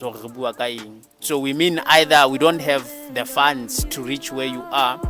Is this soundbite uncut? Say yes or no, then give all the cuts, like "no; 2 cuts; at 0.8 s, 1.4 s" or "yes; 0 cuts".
yes; 0 cuts